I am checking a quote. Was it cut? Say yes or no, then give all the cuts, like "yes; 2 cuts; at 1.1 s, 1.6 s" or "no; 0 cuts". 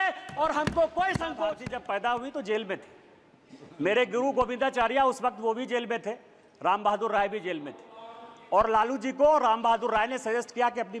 yes; 1 cut; at 1.6 s